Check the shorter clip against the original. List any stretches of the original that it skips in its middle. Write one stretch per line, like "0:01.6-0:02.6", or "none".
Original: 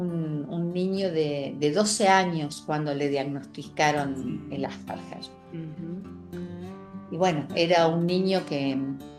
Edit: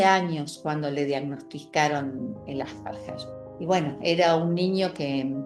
0:05.4-0:06.9